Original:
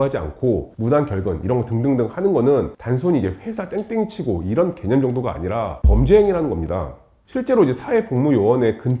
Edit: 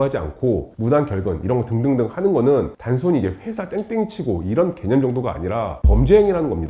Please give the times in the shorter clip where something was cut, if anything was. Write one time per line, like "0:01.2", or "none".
none